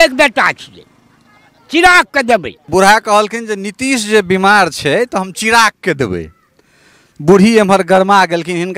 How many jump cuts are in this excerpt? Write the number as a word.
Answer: one